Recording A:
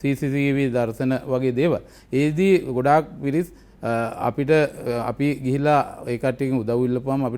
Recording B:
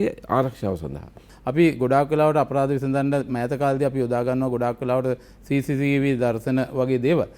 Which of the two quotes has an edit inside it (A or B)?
B